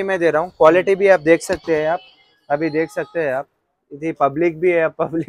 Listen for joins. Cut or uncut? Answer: uncut